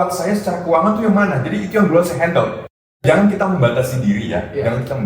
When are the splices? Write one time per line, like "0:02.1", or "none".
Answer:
0:02.8